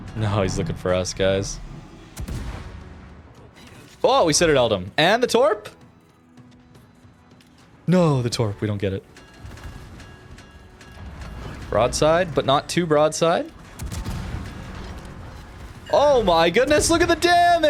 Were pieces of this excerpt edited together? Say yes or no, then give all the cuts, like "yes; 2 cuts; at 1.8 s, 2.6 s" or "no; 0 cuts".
no; 0 cuts